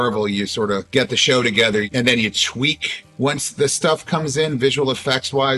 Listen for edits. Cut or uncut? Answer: uncut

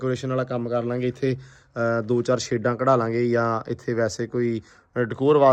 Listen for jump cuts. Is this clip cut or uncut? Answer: uncut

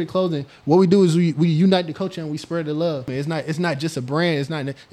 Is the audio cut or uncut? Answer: cut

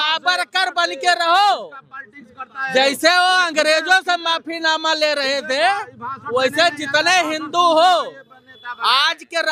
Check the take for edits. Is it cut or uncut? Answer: uncut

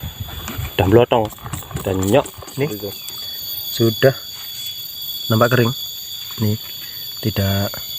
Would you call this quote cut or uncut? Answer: cut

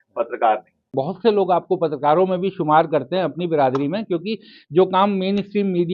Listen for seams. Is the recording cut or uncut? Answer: cut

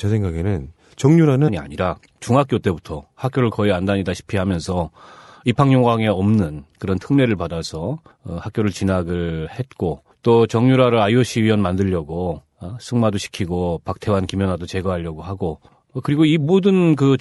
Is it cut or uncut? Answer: uncut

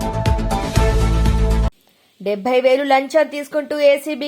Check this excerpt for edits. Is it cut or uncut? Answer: cut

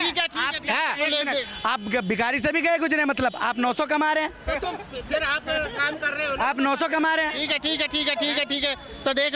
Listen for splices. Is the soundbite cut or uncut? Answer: uncut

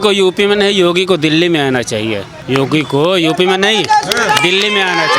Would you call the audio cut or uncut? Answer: cut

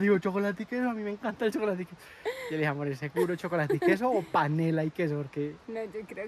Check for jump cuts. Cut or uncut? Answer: uncut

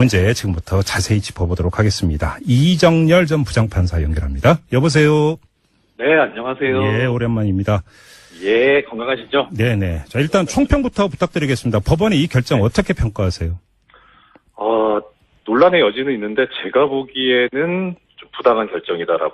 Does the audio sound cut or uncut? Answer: cut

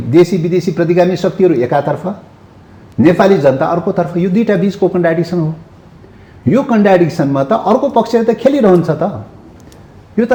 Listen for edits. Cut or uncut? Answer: uncut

